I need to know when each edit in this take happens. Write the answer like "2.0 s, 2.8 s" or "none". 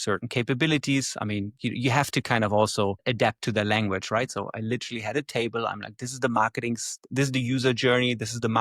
none